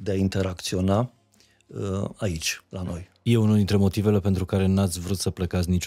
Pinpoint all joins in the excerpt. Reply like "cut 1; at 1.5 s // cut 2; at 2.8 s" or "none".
cut 1; at 3.1 s